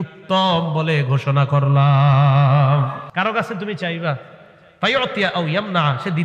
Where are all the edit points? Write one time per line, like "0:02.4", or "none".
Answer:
0:03.0